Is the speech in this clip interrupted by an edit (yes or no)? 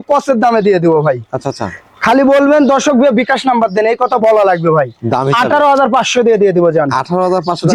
no